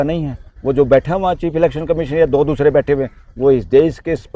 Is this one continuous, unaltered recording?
yes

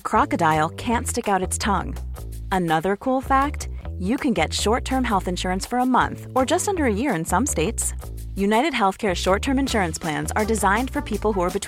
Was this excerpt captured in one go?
yes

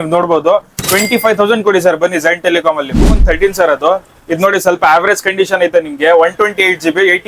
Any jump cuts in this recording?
yes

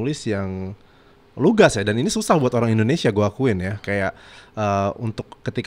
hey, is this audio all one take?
yes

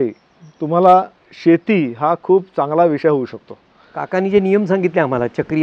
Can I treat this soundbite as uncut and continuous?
no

